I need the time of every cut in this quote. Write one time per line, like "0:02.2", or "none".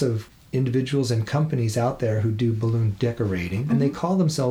0:03.6